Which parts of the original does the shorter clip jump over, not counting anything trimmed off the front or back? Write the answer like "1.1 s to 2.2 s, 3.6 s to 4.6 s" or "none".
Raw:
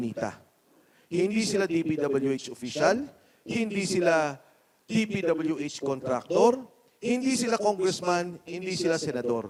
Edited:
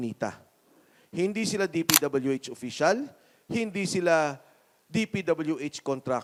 none